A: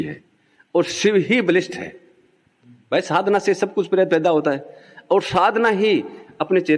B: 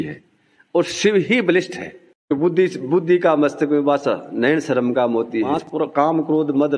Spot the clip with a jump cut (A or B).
B